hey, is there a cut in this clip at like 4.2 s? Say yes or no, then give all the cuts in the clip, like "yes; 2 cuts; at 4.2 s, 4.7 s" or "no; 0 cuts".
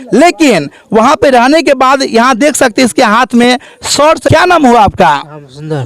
yes; 1 cut; at 4.2 s